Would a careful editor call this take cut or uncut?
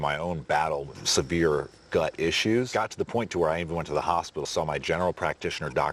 cut